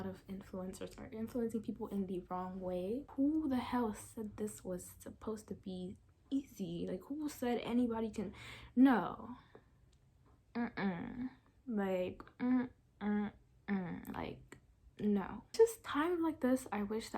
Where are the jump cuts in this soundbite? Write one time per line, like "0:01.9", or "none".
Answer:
0:03.0